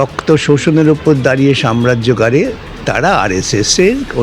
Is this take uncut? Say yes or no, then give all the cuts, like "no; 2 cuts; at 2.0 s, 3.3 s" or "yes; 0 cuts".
yes; 0 cuts